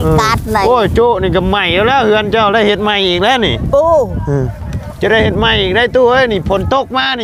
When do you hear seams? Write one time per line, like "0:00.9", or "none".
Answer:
none